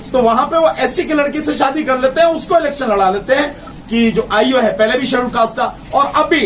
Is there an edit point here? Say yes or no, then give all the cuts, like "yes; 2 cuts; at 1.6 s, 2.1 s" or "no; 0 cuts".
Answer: yes; 1 cut; at 3.7 s